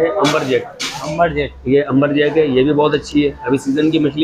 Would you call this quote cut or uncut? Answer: uncut